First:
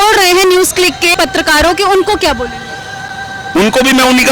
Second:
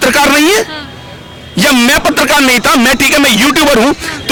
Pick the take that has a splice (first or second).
first